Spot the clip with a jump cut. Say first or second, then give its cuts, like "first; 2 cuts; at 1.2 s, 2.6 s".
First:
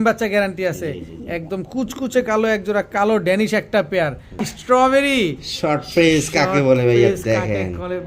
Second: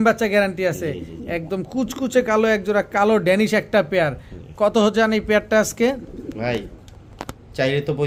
first; 1 cut; at 4.5 s